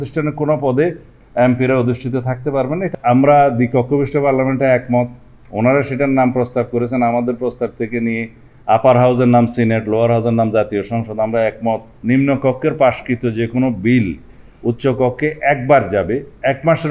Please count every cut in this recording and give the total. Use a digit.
2